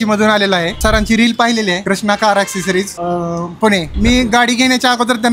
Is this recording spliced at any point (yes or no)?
yes